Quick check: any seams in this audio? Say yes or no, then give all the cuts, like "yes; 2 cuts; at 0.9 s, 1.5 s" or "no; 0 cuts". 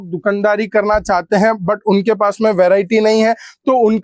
no; 0 cuts